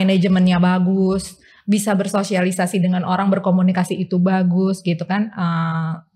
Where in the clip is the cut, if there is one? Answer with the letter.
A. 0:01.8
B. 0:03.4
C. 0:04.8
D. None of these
D